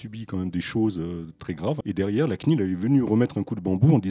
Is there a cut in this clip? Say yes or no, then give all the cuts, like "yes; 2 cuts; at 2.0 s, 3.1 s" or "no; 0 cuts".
yes; 1 cut; at 1.8 s